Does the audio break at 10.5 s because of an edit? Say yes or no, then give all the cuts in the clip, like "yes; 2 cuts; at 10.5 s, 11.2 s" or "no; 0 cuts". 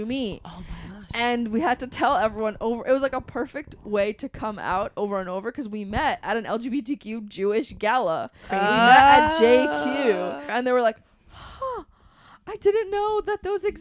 yes; 1 cut; at 10.5 s